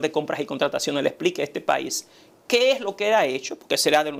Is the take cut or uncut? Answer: uncut